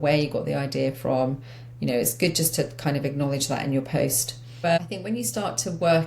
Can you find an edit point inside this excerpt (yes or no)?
yes